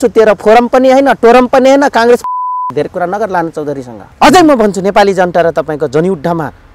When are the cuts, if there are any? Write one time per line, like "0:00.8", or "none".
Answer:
0:04.0